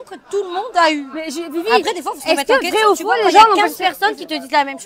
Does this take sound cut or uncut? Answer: uncut